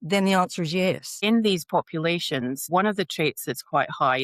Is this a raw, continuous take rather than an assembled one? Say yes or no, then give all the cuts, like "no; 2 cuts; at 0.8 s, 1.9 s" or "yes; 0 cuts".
no; 2 cuts; at 1.1 s, 2.7 s